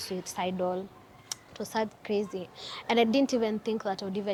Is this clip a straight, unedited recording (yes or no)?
yes